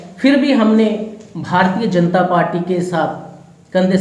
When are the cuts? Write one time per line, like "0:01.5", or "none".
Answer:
none